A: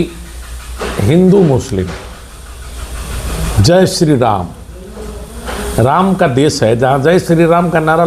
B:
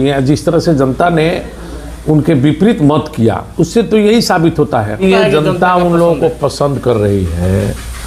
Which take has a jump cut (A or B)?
B